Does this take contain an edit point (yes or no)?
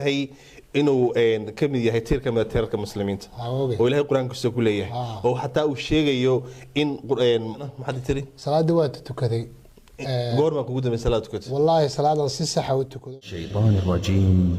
yes